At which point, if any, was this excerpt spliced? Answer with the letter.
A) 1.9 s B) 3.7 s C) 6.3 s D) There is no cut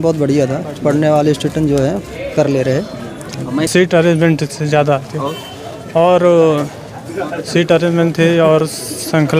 B